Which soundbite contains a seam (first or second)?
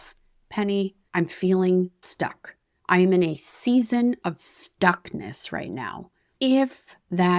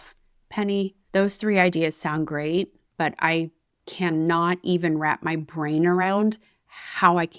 first